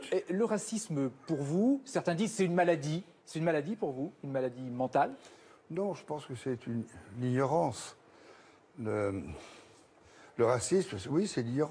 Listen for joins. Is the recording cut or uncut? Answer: cut